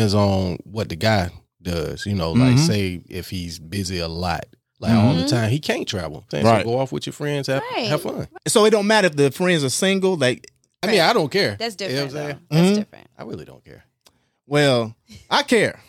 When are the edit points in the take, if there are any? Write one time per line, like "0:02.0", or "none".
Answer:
0:06.3
0:08.3
0:10.8